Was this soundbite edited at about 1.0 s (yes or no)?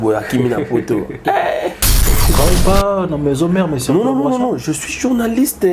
no